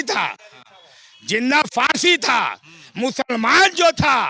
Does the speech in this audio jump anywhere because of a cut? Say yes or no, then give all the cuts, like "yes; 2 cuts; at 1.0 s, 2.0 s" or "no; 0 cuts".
no; 0 cuts